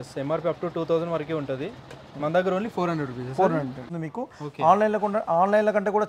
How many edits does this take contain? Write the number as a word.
one